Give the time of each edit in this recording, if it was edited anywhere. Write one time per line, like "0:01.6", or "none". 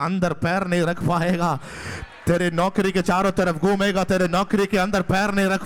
none